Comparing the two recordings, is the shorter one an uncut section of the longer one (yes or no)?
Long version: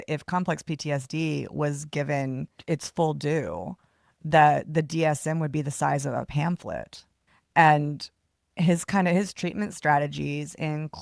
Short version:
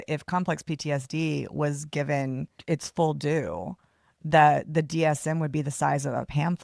yes